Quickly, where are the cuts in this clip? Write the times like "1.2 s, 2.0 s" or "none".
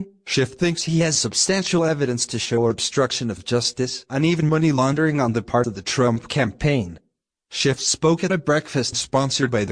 6.9 s